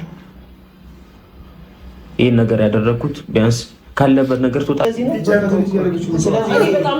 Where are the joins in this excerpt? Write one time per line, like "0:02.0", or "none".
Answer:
0:04.9